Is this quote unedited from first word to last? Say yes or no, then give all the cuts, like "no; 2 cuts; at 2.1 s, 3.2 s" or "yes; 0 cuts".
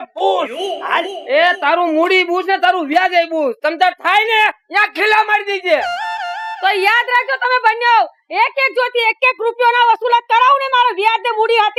yes; 0 cuts